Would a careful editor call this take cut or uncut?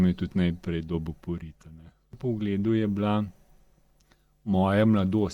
cut